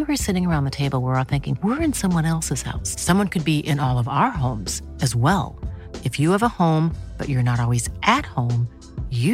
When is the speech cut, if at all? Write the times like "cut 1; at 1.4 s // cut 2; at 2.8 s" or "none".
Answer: none